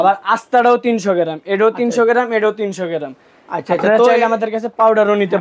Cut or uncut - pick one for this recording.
uncut